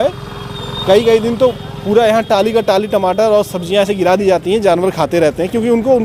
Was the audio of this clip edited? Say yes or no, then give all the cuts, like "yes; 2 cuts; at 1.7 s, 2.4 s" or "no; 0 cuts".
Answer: no; 0 cuts